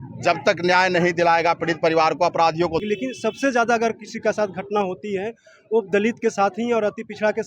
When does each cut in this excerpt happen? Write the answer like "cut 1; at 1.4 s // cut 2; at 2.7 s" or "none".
cut 1; at 2.8 s